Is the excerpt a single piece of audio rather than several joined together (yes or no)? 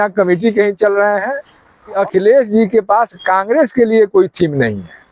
no